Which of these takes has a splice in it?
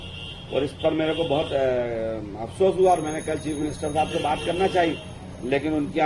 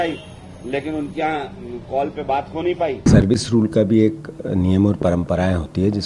second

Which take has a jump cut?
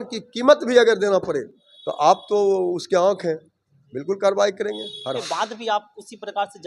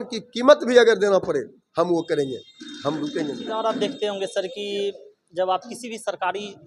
first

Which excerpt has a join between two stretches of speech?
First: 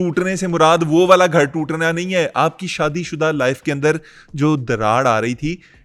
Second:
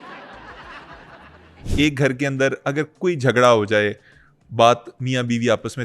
second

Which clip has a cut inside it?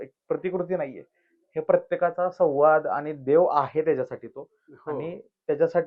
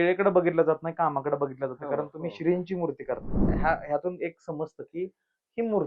second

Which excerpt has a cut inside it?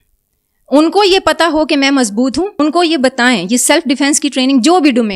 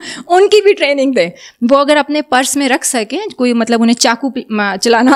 first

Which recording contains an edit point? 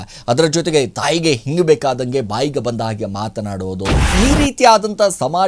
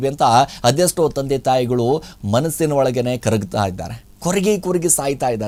first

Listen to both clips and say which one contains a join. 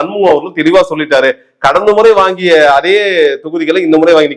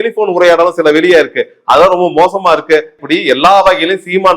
second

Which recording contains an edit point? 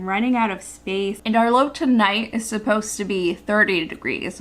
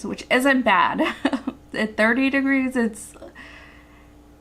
first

